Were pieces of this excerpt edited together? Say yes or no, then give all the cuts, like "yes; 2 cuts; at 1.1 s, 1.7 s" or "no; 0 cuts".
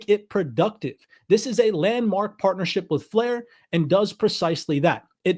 no; 0 cuts